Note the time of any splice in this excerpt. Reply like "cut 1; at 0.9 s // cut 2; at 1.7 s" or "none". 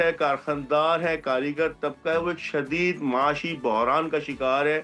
none